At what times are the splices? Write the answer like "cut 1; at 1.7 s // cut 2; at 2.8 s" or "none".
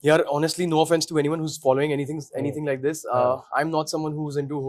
none